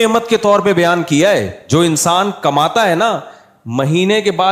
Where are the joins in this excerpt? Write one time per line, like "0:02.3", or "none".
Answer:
0:01.6